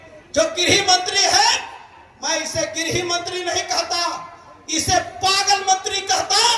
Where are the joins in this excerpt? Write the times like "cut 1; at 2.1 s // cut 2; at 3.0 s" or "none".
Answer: none